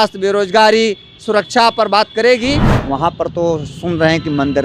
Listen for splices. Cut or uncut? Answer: cut